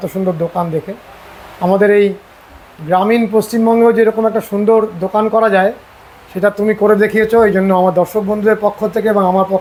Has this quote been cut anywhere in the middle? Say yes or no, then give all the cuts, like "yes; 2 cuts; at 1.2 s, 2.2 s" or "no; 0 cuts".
no; 0 cuts